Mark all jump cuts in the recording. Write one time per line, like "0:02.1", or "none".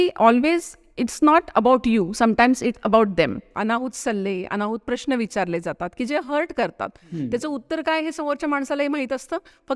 0:03.5

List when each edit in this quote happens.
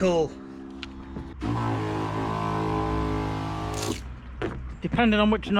0:01.3

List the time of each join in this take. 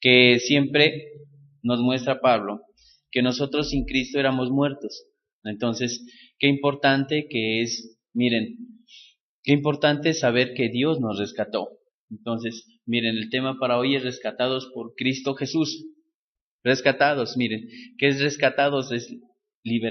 0:14.6

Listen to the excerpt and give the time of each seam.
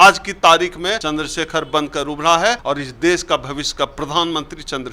0:01.0
0:02.6

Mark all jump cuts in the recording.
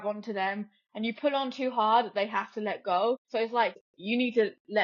0:03.7

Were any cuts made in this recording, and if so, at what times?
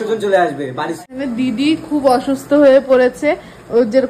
0:01.1

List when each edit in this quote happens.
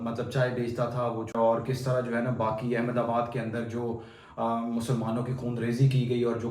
0:01.3

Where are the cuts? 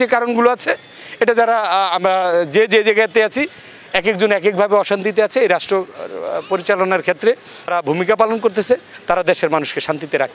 0:07.7

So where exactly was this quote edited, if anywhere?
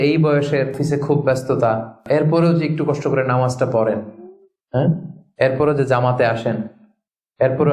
0:00.8
0:02.0

